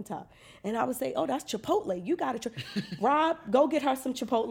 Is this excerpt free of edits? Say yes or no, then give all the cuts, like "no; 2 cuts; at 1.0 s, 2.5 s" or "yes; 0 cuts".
yes; 0 cuts